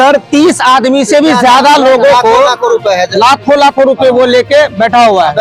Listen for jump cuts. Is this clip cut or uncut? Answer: uncut